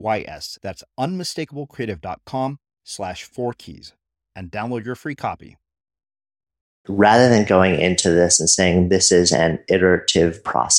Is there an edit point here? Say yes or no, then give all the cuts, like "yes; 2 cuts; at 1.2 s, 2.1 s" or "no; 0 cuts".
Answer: yes; 1 cut; at 7.0 s